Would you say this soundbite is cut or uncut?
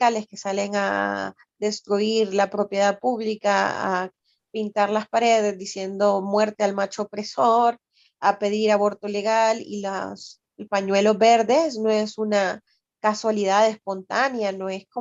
uncut